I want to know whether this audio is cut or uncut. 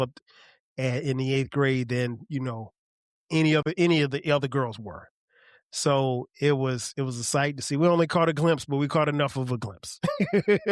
uncut